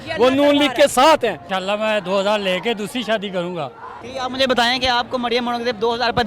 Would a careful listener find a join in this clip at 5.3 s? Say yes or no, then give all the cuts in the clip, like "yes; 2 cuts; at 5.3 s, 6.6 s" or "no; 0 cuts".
no; 2 cuts; at 1.5 s, 4.1 s